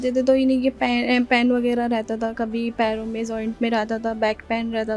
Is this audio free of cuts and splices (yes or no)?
yes